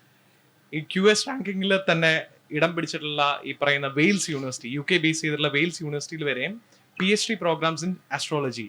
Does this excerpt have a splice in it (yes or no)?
no